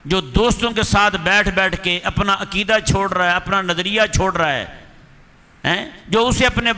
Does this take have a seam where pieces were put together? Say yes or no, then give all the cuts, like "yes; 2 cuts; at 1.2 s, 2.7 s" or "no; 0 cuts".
no; 0 cuts